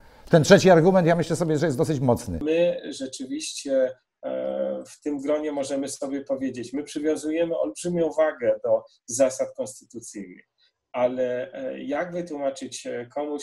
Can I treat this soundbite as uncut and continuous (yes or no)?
no